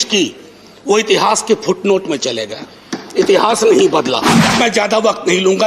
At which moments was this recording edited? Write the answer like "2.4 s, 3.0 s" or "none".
4.2 s